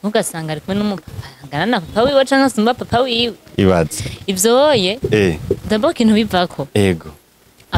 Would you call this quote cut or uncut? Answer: uncut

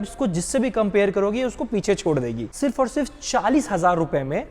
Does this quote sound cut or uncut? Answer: cut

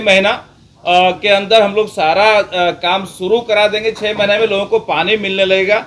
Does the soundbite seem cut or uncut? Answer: uncut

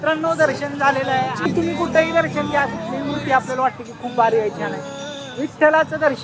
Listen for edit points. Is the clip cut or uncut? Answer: cut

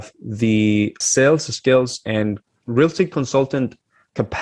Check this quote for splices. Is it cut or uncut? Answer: cut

